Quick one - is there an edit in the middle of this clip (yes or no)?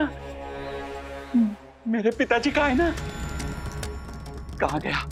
no